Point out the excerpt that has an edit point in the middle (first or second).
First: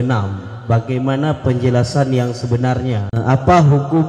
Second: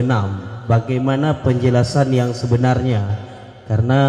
first